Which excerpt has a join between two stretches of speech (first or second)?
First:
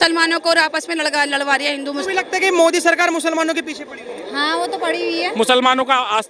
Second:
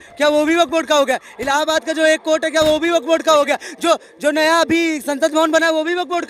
first